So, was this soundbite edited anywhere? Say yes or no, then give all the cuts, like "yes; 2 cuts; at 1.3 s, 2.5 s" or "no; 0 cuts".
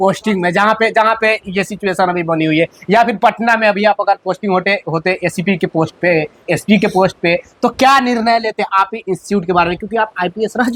no; 0 cuts